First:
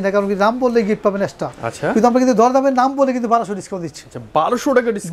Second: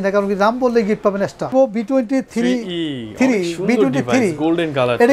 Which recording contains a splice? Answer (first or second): first